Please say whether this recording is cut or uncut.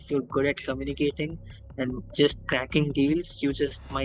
uncut